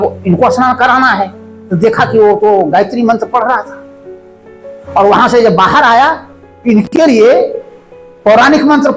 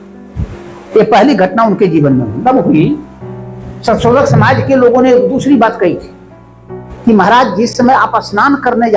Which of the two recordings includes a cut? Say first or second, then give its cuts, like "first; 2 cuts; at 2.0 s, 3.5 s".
second; 1 cut; at 2.4 s